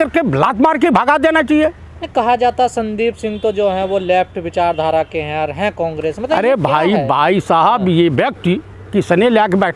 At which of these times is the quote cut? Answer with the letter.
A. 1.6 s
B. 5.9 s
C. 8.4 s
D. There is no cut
D